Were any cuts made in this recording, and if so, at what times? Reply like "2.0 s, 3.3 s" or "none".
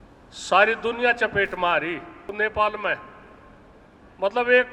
2.3 s